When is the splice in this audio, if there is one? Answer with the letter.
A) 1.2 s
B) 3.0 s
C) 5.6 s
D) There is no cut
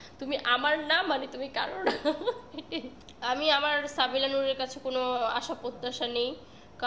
D